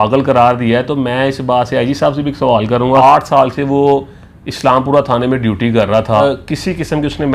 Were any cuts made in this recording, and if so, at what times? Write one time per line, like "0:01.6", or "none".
0:03.0
0:06.2